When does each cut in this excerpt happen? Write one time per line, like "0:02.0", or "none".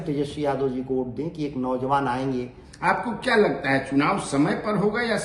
0:02.6